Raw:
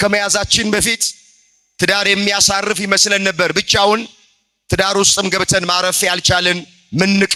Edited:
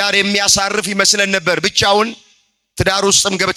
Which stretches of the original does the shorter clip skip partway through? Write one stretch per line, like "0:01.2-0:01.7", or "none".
none